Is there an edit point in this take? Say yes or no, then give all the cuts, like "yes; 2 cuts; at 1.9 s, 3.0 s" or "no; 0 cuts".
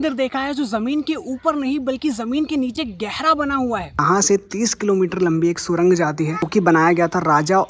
yes; 2 cuts; at 4.0 s, 6.5 s